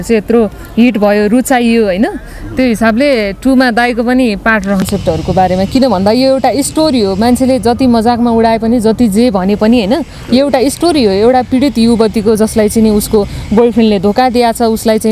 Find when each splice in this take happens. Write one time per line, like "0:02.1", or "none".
0:04.8